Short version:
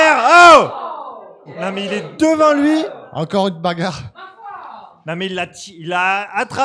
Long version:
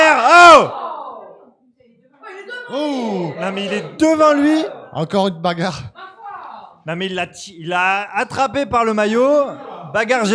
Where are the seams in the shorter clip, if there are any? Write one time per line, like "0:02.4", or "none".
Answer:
0:01.5